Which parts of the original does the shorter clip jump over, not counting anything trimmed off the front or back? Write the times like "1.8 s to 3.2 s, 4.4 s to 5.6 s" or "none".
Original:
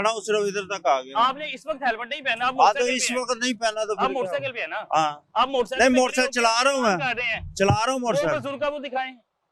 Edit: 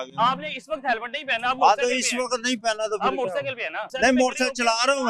4.9 s to 5.7 s